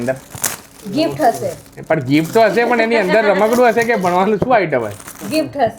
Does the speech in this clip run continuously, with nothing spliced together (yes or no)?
yes